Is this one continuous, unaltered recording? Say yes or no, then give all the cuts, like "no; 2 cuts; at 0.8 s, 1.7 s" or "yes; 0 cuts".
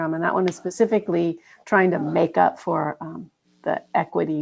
yes; 0 cuts